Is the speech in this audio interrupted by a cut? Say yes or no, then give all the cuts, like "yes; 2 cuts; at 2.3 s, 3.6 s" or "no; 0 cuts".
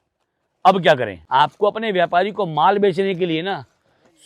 yes; 1 cut; at 1.2 s